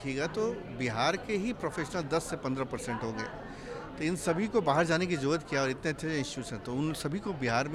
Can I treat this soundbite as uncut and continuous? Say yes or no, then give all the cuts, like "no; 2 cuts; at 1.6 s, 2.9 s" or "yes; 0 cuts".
yes; 0 cuts